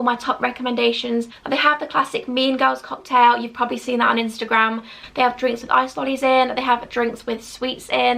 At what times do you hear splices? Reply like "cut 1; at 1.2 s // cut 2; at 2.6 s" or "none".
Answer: cut 1; at 1.3 s // cut 2; at 4.8 s

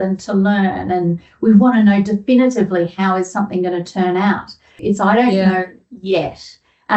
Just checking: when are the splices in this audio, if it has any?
cut 1; at 4.8 s

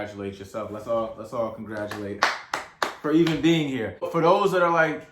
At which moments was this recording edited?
cut 1; at 4.1 s

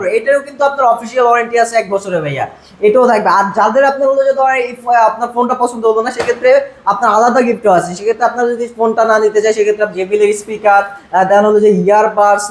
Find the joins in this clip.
none

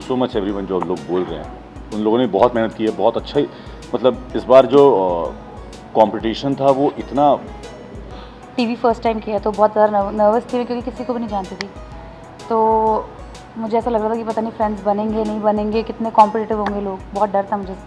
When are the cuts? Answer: cut 1; at 8.3 s

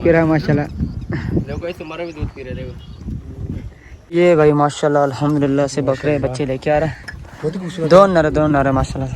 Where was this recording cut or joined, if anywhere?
cut 1; at 4.1 s

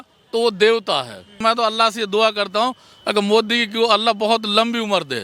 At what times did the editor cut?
cut 1; at 1.4 s

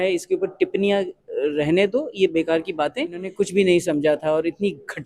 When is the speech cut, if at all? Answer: cut 1; at 3.3 s

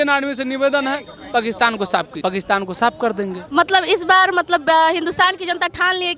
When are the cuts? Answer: cut 1; at 2.1 s

